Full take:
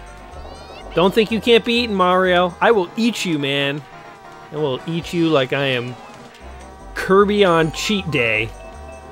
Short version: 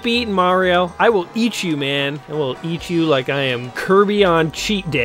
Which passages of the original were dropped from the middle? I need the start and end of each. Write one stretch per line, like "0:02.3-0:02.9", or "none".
0:03.8-0:04.5
0:05.9-0:06.9

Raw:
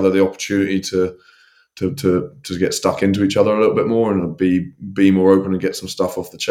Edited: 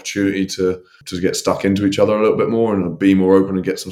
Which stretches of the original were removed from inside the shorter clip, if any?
0:01.4-0:02.4
0:04.3-0:04.9

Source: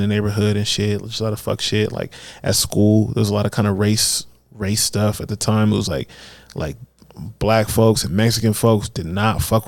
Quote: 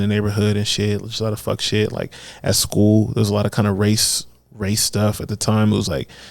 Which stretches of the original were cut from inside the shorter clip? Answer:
none

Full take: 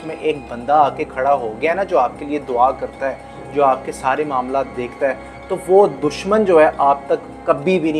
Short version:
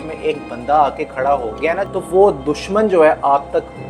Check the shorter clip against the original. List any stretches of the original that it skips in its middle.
0:01.8-0:05.4

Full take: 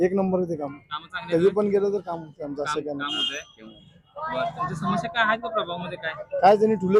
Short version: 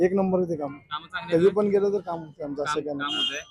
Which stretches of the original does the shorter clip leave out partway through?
none

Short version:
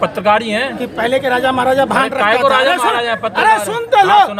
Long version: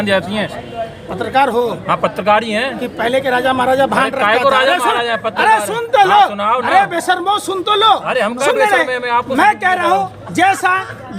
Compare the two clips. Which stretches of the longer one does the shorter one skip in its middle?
none

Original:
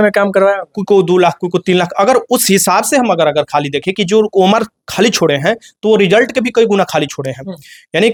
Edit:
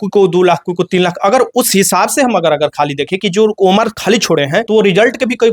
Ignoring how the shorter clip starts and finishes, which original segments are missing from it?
0:04.9-0:05.3

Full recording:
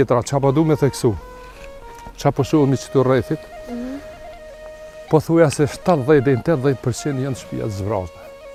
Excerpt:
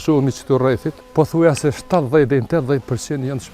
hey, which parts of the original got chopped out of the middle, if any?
0:03.4-0:04.9

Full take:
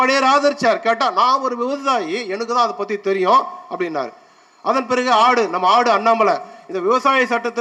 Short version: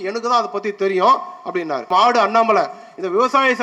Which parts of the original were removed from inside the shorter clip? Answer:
0:04.1-0:05.6

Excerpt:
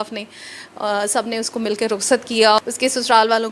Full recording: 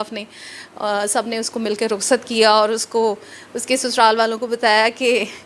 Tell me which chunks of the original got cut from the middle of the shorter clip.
0:02.6-0:03.5

